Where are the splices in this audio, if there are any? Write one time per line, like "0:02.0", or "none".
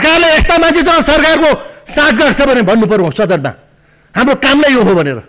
none